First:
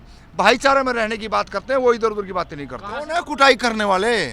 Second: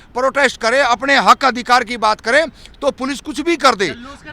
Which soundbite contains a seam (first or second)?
first